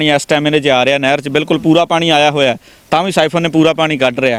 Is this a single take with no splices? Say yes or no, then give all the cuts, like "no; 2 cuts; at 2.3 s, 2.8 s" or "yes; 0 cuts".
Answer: yes; 0 cuts